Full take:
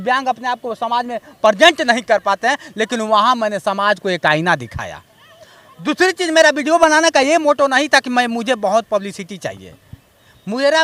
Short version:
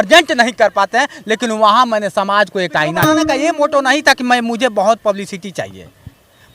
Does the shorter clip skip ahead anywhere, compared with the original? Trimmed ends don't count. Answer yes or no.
yes